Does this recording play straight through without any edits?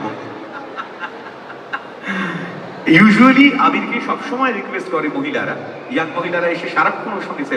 yes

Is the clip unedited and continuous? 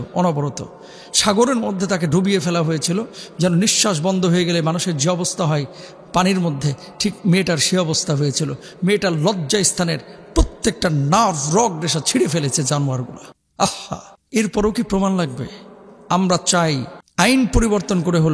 yes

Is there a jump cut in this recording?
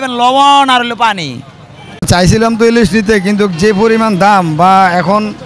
yes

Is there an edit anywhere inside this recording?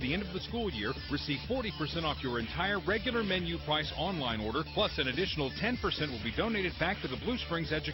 no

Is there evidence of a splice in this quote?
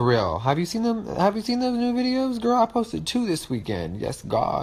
yes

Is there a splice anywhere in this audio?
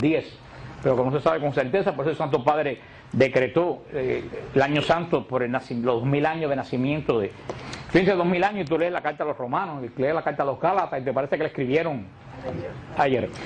yes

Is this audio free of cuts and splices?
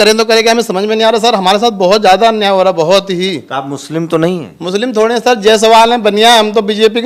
yes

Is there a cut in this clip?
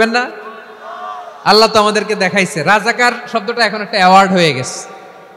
no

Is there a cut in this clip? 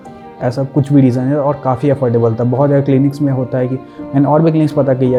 no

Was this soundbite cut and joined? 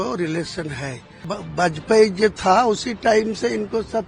yes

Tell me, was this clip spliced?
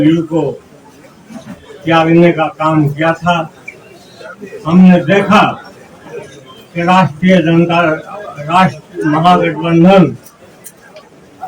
no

